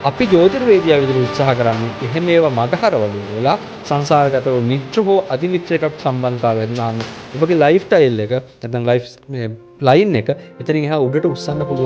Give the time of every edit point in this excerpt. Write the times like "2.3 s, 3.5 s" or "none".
none